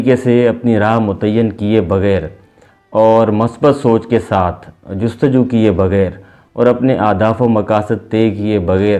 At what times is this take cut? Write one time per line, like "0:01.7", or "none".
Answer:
none